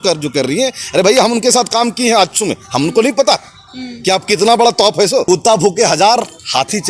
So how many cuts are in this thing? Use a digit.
1